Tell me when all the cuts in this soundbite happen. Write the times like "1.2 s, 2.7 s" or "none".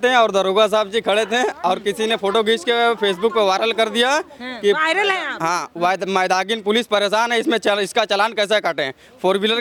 none